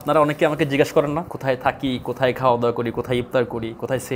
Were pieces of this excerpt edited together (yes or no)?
yes